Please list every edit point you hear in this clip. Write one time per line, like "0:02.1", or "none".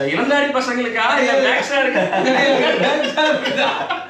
none